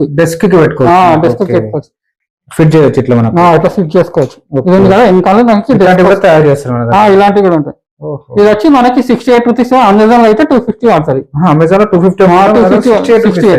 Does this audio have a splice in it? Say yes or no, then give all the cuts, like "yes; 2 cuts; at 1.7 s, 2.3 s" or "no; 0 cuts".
no; 0 cuts